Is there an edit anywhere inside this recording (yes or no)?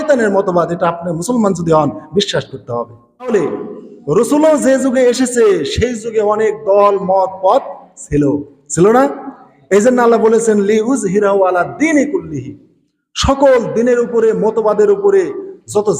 yes